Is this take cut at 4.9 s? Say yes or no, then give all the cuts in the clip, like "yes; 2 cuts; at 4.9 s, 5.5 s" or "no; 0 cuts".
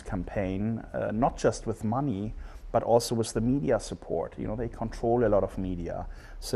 no; 1 cut; at 3.1 s